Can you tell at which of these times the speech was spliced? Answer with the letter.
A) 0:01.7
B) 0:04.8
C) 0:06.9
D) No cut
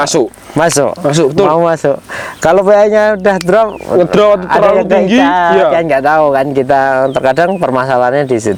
D